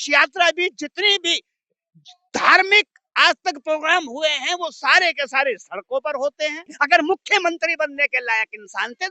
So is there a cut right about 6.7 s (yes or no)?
yes